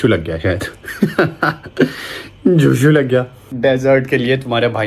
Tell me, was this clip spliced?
yes; 1 cut; at 3.5 s

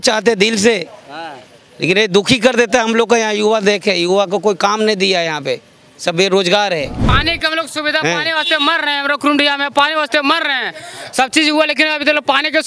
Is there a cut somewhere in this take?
yes; 1 cut; at 7.1 s

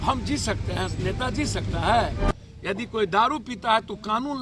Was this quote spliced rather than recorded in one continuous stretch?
yes; 1 cut; at 2.2 s

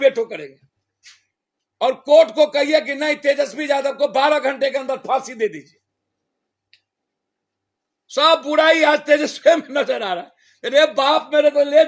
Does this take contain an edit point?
no; 0 cuts

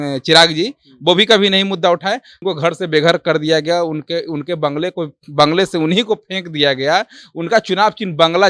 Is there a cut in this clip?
yes; 1 cut; at 2.4 s

